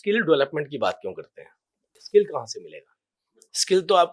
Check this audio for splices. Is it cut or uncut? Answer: cut